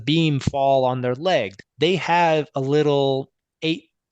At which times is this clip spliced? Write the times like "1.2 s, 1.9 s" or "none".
1.6 s